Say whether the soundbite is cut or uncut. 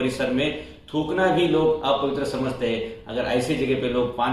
uncut